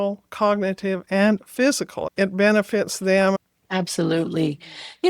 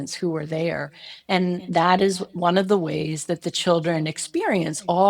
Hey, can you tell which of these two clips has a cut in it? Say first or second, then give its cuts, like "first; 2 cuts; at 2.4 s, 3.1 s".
first; 2 cuts; at 2.0 s, 3.4 s